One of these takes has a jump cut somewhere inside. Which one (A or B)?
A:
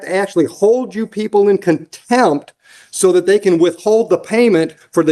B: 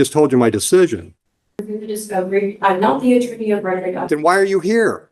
B